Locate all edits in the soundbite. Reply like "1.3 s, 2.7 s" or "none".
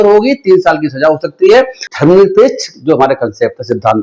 1.8 s